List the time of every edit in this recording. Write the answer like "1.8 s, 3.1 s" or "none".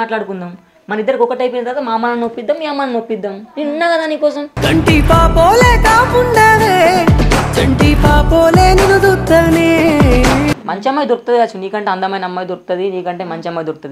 10.5 s